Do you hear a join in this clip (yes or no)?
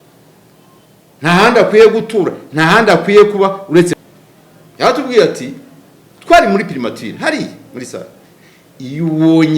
yes